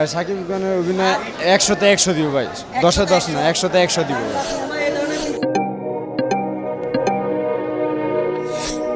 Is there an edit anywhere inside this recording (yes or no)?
no